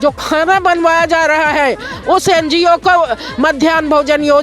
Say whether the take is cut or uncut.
uncut